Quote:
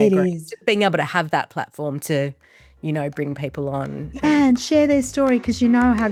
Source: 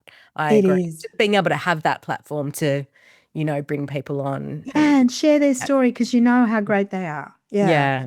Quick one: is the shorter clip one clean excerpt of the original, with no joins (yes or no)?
yes